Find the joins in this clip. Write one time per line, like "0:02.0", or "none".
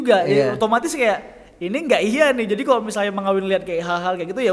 none

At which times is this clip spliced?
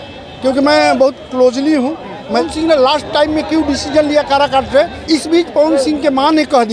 0:02.4
0:05.0

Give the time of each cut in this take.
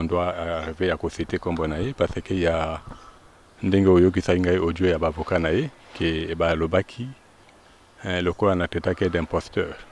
none

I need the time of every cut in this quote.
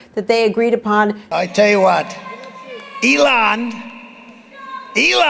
0:01.2

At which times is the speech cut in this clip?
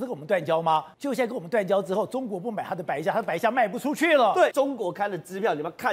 0:00.9
0:04.5

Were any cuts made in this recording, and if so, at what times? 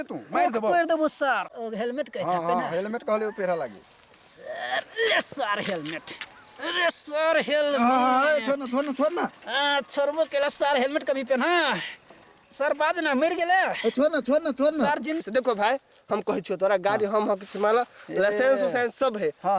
0:01.6
0:15.2

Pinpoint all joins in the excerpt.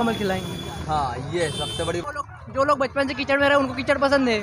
0:02.0

